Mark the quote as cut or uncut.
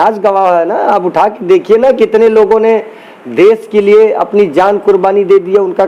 uncut